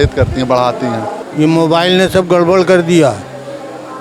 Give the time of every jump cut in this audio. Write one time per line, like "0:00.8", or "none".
0:01.2